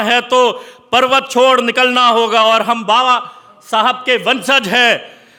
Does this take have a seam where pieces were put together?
no; 0 cuts

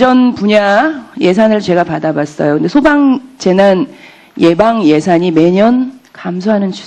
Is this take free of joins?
no; 1 cut; at 1.5 s

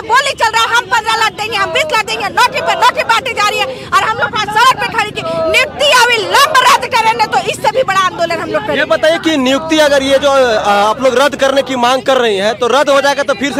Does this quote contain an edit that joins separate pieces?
no; 0 cuts

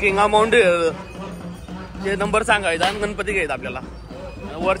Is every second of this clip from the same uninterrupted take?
yes; 0 cuts

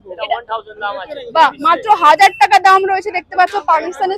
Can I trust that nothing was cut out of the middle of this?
yes; 0 cuts

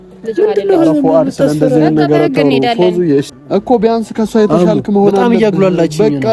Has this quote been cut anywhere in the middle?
yes; 1 cut; at 3.4 s

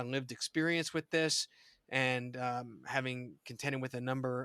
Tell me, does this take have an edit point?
no; 0 cuts

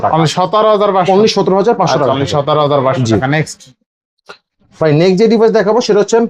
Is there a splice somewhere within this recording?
no; 0 cuts

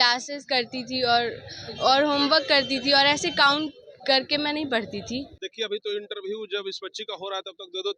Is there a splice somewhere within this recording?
yes; 1 cut; at 5.4 s

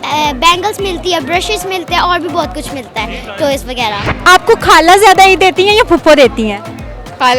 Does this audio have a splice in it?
yes; 1 cut; at 4.1 s

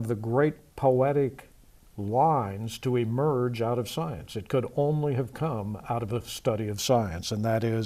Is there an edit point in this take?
yes; 1 cut; at 6.6 s

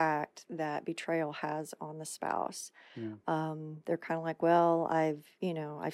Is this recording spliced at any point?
no; 0 cuts

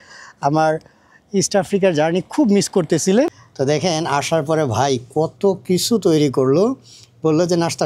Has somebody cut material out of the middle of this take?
yes; 1 cut; at 3.3 s

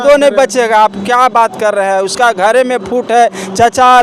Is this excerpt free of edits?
yes; 0 cuts

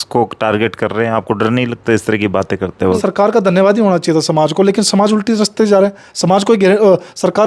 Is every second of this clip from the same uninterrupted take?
no; 1 cut; at 3.0 s

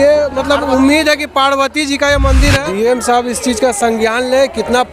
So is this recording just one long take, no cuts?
no; 1 cut; at 2.7 s

